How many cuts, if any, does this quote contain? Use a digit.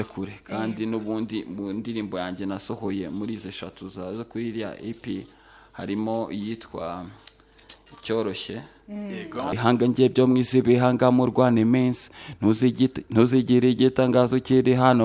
1